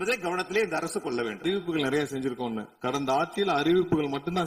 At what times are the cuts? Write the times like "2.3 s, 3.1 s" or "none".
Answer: 1.4 s